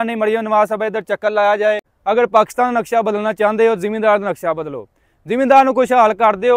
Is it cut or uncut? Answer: cut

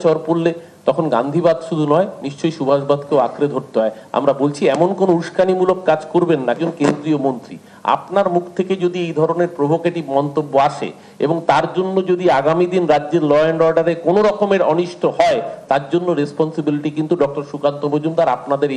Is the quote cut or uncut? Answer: uncut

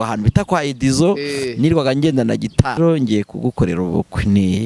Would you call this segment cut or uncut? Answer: cut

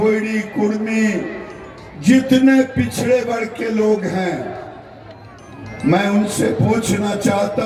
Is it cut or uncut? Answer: uncut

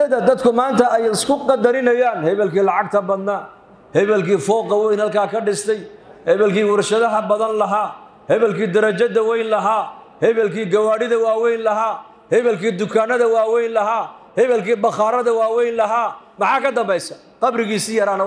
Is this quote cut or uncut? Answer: uncut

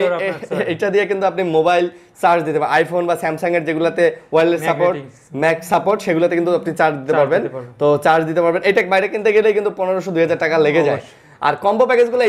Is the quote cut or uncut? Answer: uncut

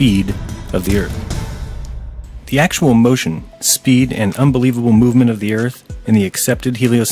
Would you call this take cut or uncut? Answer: cut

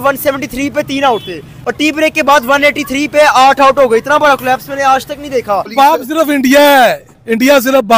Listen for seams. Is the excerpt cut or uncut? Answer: cut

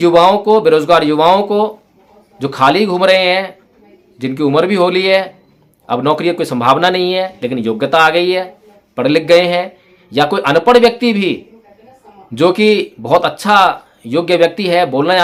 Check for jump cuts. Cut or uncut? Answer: uncut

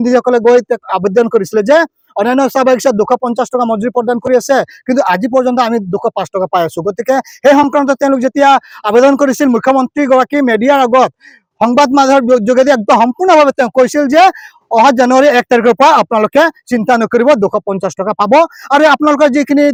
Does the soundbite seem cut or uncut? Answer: uncut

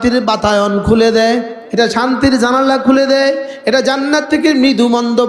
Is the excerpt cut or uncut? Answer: cut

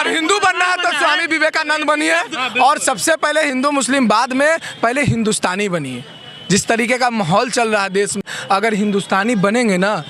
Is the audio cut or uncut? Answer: cut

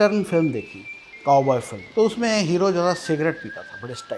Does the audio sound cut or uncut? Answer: cut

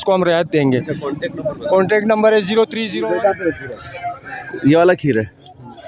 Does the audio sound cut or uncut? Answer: cut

